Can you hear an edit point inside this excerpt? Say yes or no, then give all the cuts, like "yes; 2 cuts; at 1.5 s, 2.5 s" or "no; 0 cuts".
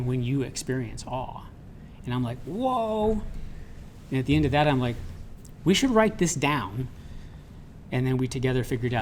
no; 0 cuts